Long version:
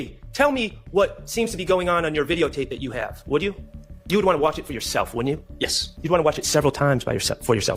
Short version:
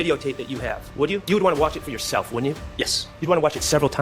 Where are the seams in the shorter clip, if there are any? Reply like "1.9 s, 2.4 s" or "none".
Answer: 1.2 s